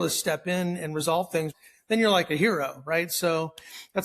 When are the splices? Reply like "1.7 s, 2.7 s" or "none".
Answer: 1.6 s